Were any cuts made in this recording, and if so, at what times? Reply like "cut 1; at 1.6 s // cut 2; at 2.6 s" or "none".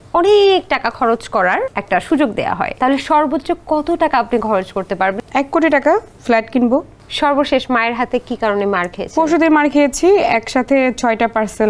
cut 1; at 1.8 s // cut 2; at 2.7 s // cut 3; at 5.2 s // cut 4; at 6.1 s // cut 5; at 7.0 s